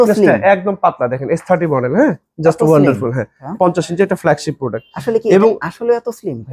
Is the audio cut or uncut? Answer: cut